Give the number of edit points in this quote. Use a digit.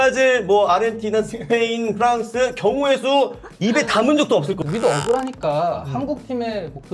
1